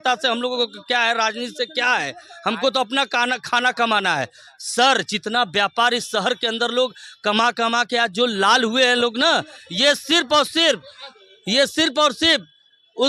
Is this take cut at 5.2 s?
no; 0 cuts

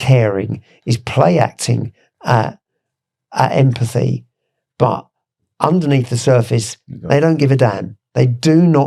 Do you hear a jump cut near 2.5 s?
no; 0 cuts

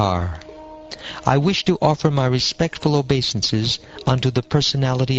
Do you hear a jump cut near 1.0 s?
no; 1 cut; at 2.6 s

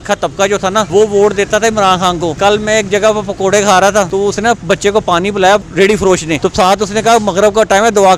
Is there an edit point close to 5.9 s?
yes; 4 cuts; at 0.9 s, 2.3 s, 4.1 s, 5.9 s

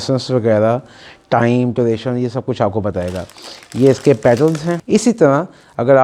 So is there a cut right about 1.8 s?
no; 1 cut; at 4.8 s

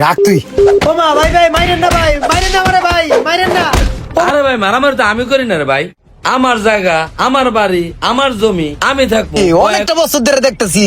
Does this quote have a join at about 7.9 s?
no; 3 cuts; at 0.8 s, 4.3 s, 9.4 s

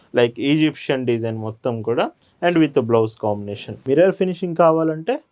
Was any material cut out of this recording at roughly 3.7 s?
yes; 1 cut; at 3.7 s

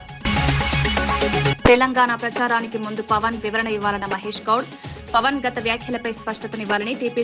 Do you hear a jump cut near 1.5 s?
yes; 1 cut; at 1.5 s

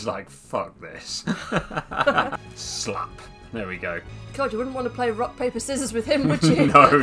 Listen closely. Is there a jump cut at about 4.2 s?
yes; 2 cuts; at 2.4 s, 4.2 s

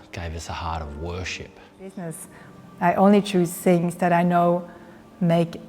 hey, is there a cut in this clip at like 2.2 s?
yes; 1 cut; at 2.2 s

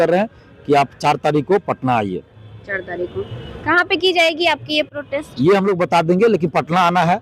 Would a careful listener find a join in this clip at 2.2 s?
no; 0 cuts

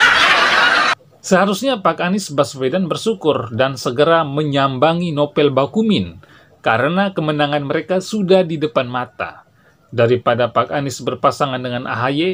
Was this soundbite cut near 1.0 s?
yes; 1 cut; at 1.0 s

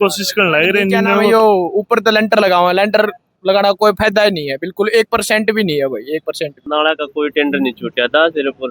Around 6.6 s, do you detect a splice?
yes; 2 cuts; at 1.3 s, 6.6 s

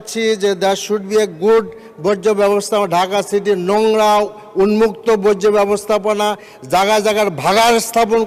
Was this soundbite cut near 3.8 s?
no; 0 cuts

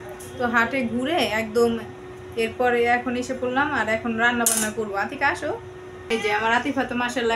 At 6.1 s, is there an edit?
yes; 1 cut; at 6.1 s

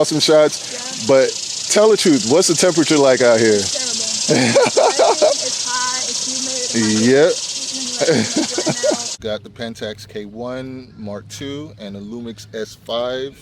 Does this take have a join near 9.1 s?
yes; 1 cut; at 9.1 s

